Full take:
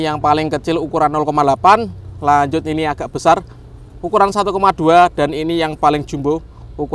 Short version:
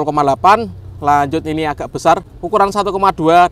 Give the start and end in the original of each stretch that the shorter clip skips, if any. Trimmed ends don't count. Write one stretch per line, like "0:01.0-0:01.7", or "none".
0:03.5-0:03.9